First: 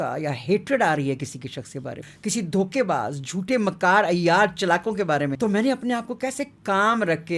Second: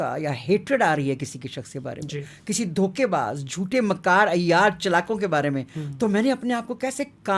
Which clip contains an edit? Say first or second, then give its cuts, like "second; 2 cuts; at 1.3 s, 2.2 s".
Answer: first; 2 cuts; at 2.0 s, 5.3 s